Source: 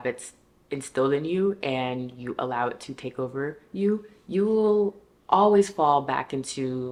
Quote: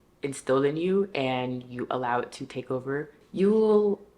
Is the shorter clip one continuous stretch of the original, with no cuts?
no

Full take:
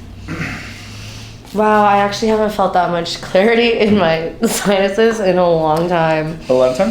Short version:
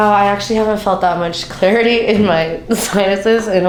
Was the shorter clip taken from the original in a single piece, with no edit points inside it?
yes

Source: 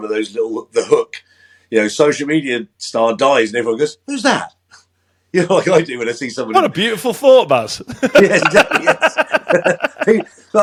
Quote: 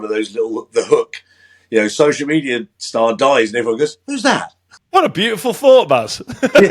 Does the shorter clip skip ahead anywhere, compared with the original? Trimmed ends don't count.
yes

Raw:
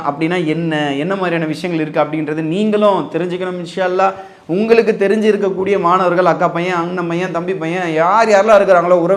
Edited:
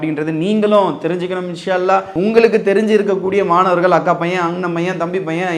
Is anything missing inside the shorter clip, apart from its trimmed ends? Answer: yes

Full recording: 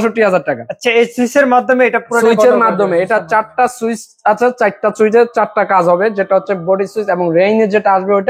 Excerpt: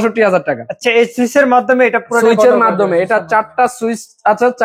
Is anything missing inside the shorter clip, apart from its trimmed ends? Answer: no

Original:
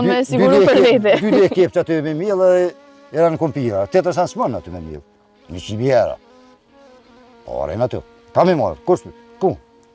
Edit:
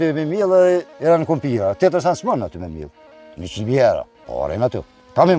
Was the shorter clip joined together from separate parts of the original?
yes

